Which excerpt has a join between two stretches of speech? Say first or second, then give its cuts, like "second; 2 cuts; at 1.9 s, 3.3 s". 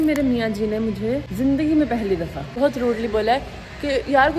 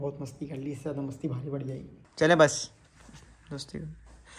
second; 1 cut; at 1.6 s